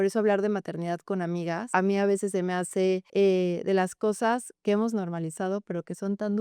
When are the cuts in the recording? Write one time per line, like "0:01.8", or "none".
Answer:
0:01.6
0:03.1